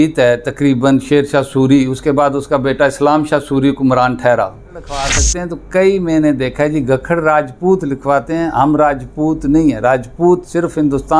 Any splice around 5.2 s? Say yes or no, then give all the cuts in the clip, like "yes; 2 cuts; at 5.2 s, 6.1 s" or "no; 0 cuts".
yes; 1 cut; at 5.2 s